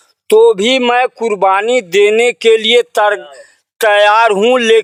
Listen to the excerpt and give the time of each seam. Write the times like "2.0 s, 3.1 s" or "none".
none